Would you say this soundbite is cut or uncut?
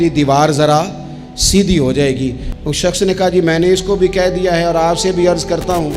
cut